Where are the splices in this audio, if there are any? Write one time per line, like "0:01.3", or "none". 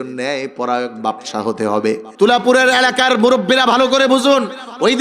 0:02.1